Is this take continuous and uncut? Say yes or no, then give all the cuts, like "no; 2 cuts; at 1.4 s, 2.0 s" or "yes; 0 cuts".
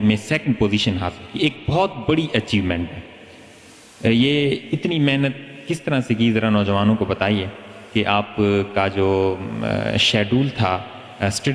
yes; 0 cuts